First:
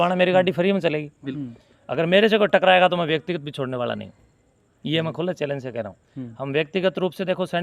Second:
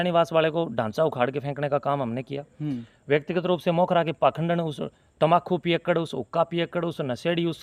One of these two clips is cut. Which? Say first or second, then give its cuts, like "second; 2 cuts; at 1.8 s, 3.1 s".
first; 1 cut; at 1.4 s